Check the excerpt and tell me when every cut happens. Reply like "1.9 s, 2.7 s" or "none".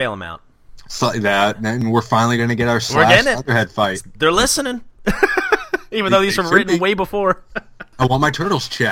7.8 s